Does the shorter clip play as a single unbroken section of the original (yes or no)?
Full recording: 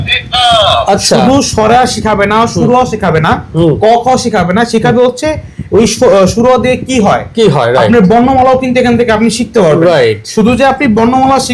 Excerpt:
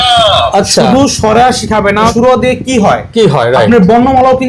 no